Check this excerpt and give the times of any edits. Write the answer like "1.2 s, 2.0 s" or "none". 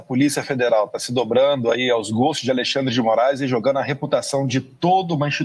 none